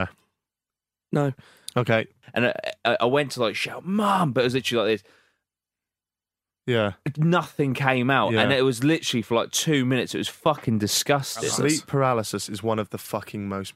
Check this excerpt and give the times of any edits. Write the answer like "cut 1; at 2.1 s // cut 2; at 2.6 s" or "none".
cut 1; at 2.2 s // cut 2; at 11.5 s